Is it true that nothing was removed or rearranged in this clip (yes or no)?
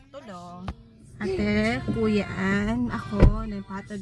yes